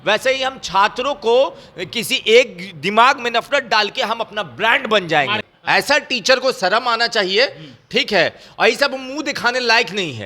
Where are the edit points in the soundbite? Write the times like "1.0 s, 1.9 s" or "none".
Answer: 5.5 s